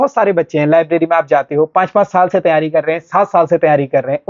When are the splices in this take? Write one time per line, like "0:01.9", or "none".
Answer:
none